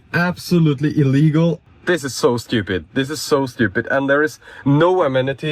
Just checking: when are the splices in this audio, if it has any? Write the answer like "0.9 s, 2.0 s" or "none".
1.6 s